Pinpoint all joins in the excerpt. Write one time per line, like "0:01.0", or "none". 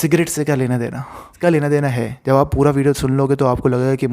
0:01.4

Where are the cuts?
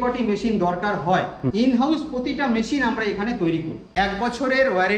0:01.4
0:03.8

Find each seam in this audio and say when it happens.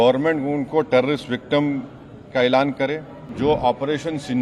0:03.2

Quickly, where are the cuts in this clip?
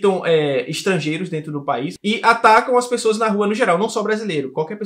0:01.9

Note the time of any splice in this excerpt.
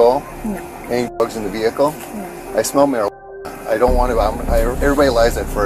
none

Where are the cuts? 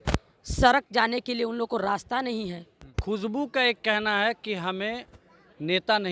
0:02.9

